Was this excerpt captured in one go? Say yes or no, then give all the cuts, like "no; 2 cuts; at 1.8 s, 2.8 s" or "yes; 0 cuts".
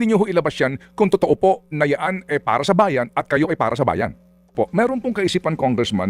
no; 1 cut; at 4.5 s